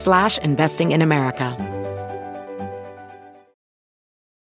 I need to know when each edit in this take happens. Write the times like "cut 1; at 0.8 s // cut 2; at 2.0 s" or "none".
cut 1; at 1.5 s